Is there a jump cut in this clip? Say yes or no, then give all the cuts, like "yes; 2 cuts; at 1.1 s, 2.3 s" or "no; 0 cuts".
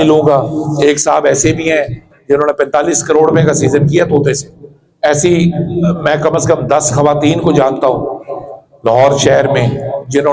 yes; 1 cut; at 5.0 s